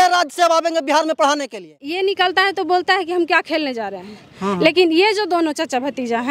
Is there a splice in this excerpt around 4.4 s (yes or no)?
no